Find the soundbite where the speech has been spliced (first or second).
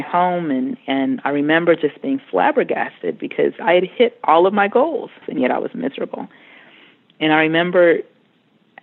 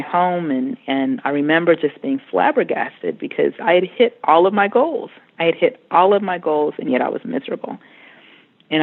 first